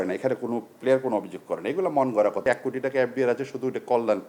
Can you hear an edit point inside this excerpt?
yes; 1 cut; at 2.4 s

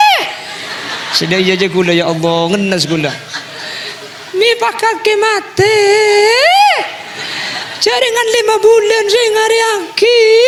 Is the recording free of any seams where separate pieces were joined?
yes; 0 cuts

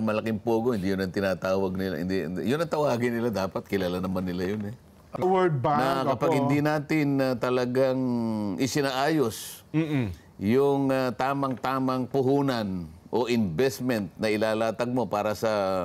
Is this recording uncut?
no; 1 cut; at 5.2 s

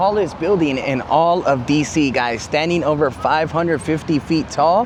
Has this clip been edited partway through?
no; 0 cuts

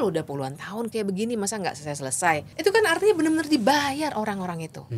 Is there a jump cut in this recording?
yes; 1 cut; at 2.5 s

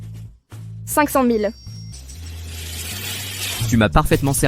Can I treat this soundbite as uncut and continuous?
no; 1 cut; at 1.9 s

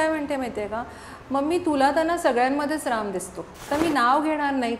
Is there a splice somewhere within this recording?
yes; 1 cut; at 3.6 s

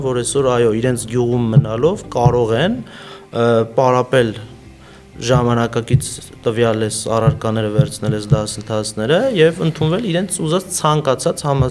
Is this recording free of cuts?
yes; 0 cuts

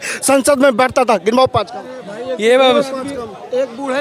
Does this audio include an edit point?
no; 0 cuts

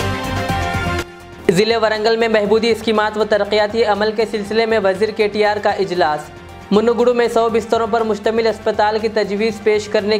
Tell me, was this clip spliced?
yes; 1 cut; at 1.0 s

